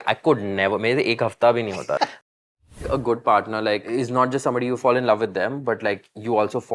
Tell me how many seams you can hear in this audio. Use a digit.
3